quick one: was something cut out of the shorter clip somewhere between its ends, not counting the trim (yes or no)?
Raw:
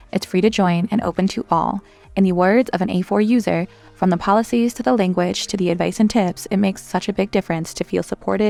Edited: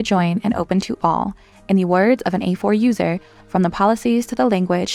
no